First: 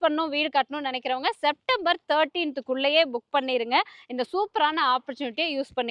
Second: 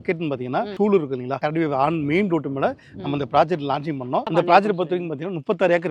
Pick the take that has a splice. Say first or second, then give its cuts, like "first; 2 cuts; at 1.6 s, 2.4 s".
second; 2 cuts; at 1.1 s, 4.3 s